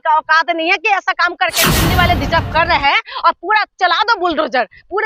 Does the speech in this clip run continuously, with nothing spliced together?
no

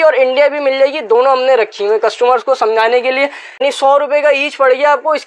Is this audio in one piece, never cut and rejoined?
no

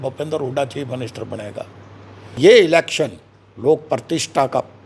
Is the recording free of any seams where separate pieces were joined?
no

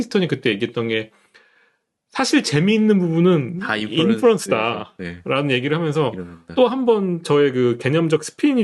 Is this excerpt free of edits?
yes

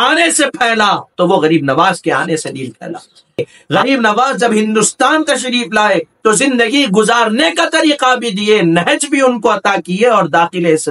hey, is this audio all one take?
no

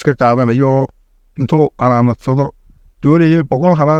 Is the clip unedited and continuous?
yes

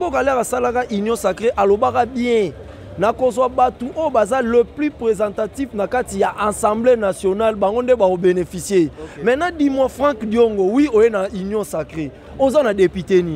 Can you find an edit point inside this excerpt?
no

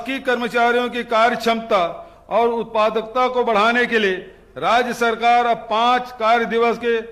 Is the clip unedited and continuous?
yes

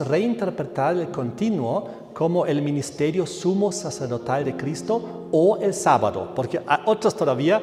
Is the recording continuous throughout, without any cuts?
yes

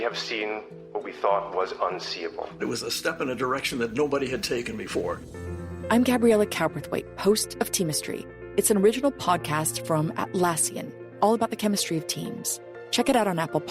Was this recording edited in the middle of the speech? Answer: no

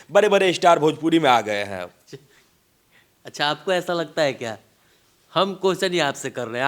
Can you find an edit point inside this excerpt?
no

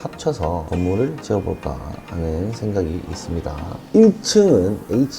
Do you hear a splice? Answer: yes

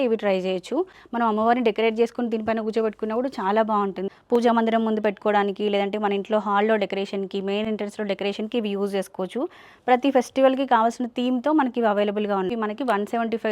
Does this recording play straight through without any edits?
no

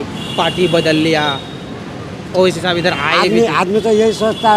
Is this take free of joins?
yes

